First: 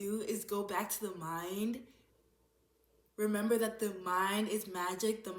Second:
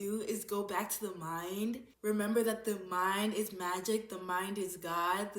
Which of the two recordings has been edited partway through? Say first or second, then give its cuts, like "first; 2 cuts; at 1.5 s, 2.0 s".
second; 1 cut; at 1.9 s